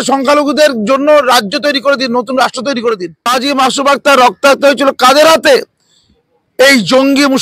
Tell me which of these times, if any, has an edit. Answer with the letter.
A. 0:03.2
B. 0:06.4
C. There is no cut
A